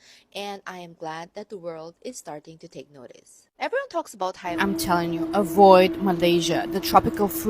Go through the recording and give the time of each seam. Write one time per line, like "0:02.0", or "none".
0:04.5